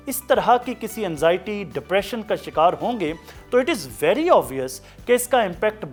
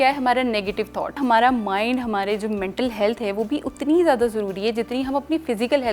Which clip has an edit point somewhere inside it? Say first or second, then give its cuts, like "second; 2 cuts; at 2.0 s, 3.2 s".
second; 1 cut; at 1.2 s